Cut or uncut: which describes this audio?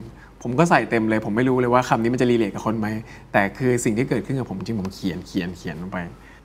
uncut